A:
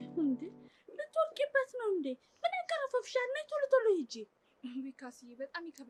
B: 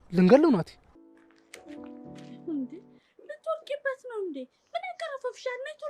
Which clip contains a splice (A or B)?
B